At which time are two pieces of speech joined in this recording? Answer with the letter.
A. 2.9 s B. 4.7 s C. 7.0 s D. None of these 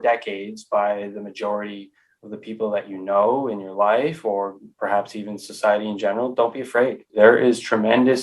C